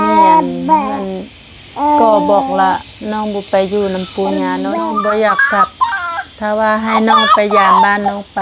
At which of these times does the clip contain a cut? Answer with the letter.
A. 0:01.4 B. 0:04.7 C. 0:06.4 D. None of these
B